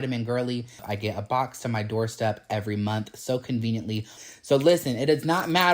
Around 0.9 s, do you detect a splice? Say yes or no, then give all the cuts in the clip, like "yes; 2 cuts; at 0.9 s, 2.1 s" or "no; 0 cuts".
yes; 2 cuts; at 0.9 s, 4.1 s